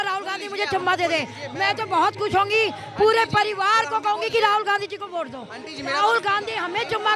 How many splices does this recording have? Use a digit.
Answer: 0